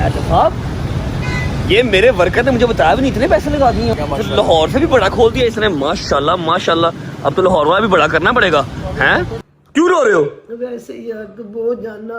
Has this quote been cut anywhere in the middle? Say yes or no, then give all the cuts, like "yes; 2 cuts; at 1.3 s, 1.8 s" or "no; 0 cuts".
yes; 2 cuts; at 3.9 s, 9.5 s